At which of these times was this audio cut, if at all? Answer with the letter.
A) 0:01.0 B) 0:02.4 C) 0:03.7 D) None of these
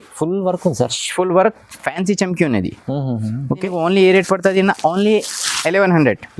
D